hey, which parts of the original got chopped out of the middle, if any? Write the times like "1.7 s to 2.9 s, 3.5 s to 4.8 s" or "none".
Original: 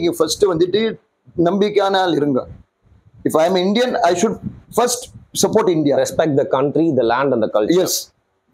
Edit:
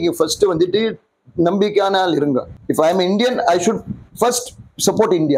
2.6 s to 3.1 s